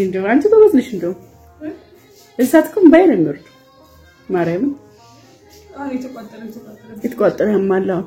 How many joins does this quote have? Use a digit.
0